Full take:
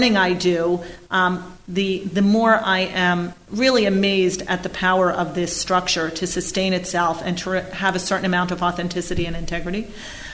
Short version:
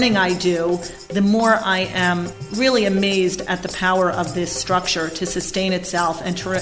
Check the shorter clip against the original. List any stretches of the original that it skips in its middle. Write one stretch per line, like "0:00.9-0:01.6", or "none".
0:01.0-0:02.0